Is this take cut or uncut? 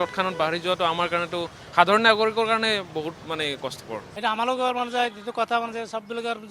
cut